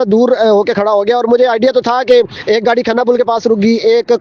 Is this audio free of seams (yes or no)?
no